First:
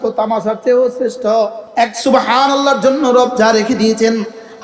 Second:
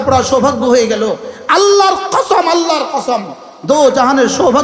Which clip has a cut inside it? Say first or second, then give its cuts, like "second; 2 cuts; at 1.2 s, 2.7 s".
first; 1 cut; at 1.6 s